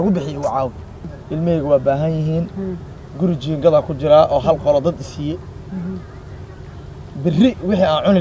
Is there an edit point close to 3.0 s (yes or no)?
no